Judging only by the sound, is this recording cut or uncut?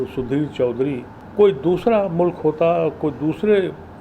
cut